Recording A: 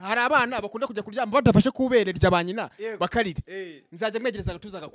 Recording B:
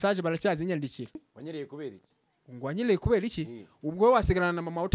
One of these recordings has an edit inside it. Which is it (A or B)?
B